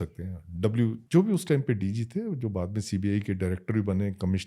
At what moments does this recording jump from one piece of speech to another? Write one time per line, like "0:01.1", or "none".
0:01.0